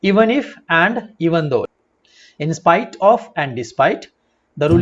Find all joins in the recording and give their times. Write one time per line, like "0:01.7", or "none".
0:01.8